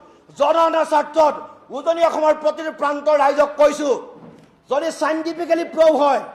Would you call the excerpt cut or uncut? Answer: uncut